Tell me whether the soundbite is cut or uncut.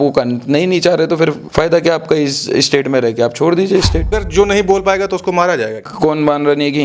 cut